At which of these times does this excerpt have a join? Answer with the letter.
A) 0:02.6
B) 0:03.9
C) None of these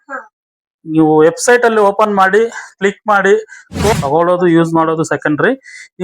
B